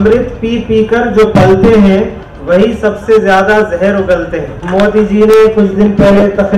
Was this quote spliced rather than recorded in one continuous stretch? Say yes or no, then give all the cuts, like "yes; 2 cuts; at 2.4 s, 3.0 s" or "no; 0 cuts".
yes; 1 cut; at 4.6 s